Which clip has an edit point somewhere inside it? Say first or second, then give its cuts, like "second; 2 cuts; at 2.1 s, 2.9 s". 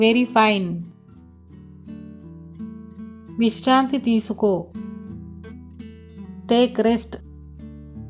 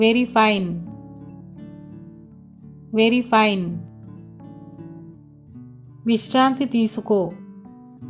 second; 5 cuts; at 1.3 s, 2.9 s, 4.4 s, 6.0 s, 7.4 s